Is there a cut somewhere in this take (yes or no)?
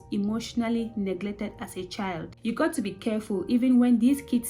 yes